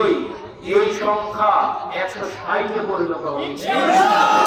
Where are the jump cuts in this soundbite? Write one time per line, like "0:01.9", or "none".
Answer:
none